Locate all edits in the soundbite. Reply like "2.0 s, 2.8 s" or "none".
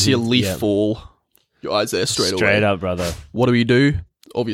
3.1 s